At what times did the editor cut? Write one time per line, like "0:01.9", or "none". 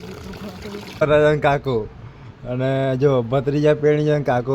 0:01.0